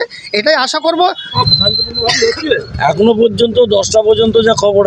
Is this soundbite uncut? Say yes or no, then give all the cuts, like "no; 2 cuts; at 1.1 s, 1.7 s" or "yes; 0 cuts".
no; 1 cut; at 1.2 s